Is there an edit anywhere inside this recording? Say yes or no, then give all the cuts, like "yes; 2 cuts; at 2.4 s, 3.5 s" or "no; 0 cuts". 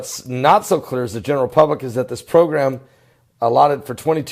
yes; 1 cut; at 2.9 s